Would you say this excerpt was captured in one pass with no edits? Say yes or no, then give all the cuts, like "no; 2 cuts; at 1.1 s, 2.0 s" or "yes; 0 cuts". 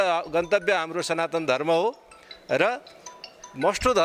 yes; 0 cuts